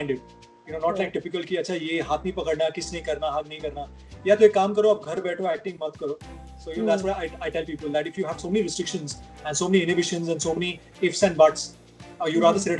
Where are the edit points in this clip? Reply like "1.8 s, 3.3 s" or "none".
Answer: none